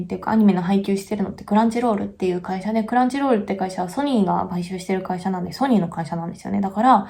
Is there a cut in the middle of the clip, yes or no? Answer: no